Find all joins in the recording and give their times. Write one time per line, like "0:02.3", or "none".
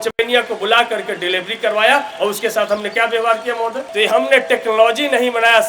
0:03.8